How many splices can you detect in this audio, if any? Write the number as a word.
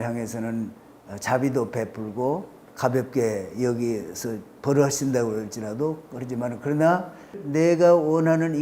two